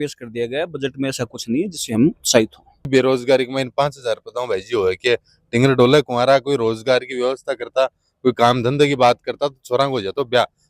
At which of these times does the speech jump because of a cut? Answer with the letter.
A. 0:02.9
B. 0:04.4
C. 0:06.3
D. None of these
A